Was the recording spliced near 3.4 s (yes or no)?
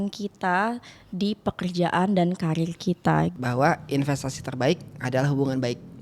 yes